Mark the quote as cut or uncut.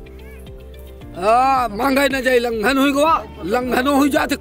cut